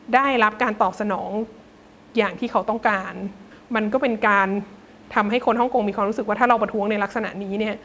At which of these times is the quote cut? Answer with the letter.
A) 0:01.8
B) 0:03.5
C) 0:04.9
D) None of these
B